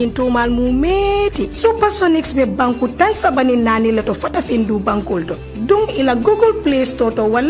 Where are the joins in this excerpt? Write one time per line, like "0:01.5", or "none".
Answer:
none